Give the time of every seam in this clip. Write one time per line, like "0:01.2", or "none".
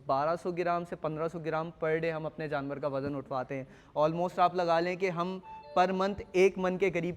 none